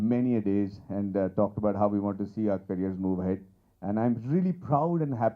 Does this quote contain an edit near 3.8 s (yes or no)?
no